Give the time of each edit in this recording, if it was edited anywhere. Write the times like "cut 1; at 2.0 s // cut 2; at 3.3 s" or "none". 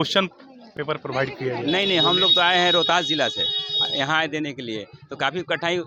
cut 1; at 1.6 s